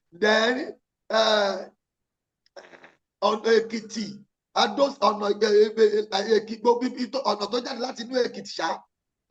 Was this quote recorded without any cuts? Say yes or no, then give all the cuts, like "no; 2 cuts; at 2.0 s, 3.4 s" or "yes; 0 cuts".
yes; 0 cuts